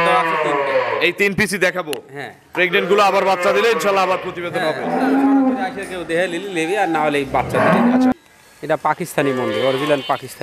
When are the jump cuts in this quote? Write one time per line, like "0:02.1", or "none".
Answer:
0:08.1

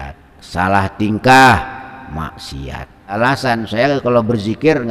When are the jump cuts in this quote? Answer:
0:03.2

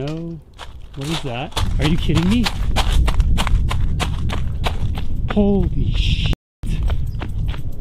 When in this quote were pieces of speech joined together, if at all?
0:01.6

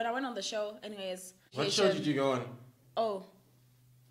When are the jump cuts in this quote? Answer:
0:01.4

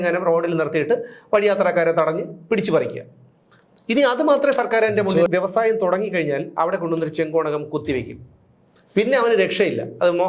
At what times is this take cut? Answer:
0:05.3

